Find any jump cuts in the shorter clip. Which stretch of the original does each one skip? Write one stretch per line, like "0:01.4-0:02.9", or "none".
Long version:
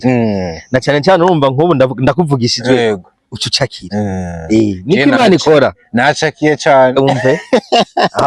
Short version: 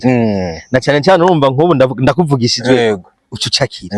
none